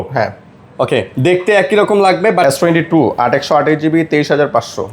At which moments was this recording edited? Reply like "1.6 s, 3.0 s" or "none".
2.4 s